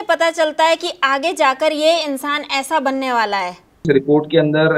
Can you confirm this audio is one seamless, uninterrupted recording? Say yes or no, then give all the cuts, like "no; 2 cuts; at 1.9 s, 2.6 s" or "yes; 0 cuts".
no; 1 cut; at 3.9 s